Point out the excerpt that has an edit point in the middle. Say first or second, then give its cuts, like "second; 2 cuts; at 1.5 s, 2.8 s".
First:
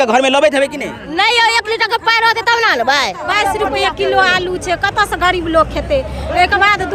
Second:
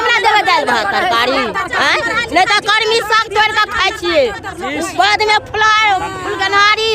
first; 1 cut; at 3.3 s